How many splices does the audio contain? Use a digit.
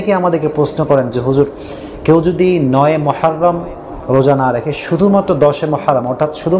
0